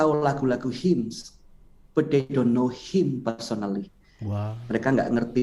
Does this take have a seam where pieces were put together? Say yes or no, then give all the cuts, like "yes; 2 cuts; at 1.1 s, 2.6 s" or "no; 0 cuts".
no; 0 cuts